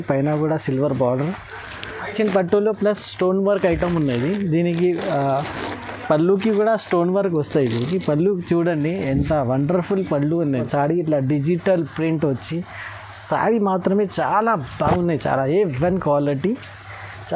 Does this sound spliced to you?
yes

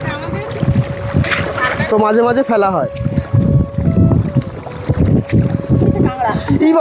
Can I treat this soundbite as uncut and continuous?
yes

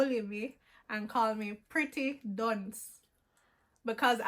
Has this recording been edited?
no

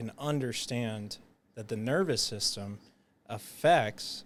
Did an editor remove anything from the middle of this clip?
no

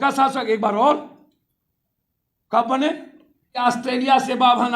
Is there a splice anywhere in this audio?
yes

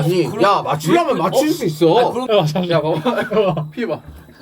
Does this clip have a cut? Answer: yes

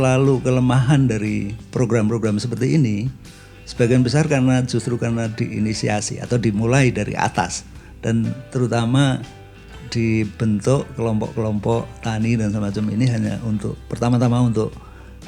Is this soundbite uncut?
yes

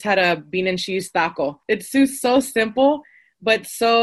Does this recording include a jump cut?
yes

